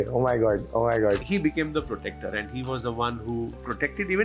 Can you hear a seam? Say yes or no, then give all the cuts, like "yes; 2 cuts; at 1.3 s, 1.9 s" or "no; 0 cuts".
yes; 1 cut; at 1.2 s